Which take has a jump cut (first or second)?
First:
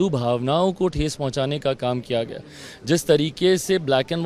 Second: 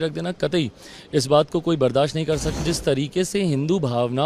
second